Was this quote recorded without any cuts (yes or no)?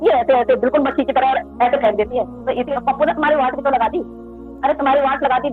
no